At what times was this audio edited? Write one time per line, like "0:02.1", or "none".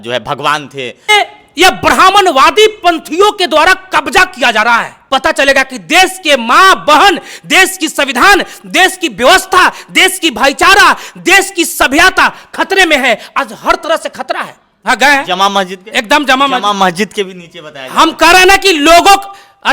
0:01.1
0:05.0
0:14.7